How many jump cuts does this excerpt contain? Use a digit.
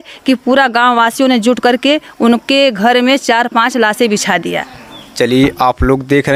0